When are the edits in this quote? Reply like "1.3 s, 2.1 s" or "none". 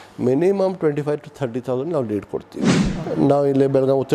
2.9 s